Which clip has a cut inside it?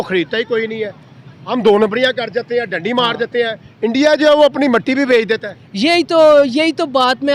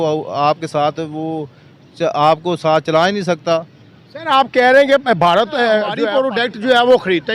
second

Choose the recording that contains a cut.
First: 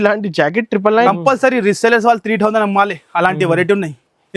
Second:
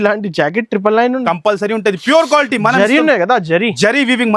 first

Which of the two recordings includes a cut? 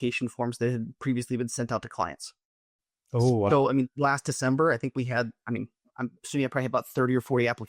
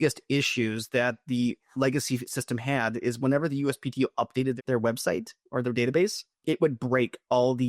second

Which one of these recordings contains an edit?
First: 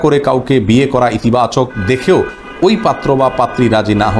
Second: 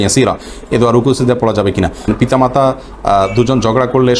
second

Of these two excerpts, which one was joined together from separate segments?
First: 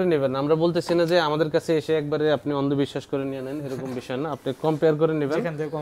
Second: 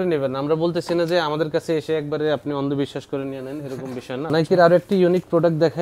second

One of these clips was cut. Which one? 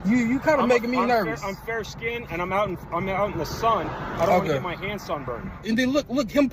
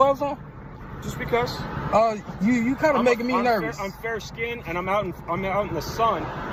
first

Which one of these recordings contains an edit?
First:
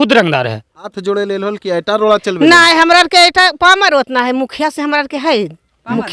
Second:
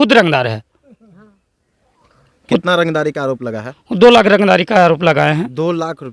first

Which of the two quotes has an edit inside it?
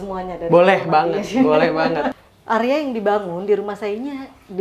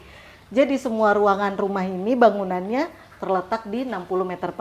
first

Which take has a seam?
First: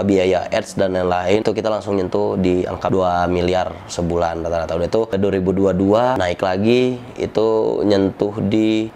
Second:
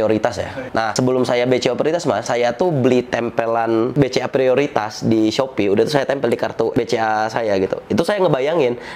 first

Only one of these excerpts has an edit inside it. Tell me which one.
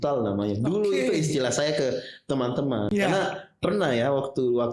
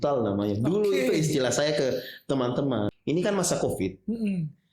second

